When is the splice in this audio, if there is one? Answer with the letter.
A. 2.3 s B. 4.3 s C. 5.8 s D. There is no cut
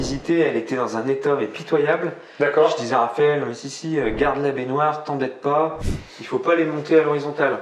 C